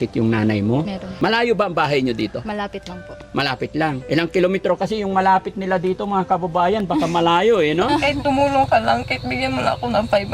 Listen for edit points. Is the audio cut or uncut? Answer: cut